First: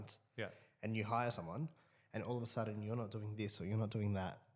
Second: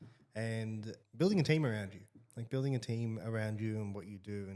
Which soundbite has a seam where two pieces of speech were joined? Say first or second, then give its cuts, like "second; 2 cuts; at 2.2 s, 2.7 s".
second; 1 cut; at 1.0 s